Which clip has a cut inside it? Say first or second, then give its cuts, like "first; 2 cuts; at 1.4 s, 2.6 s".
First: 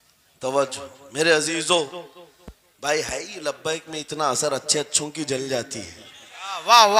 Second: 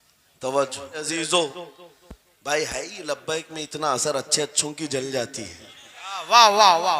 second; 1 cut; at 1.1 s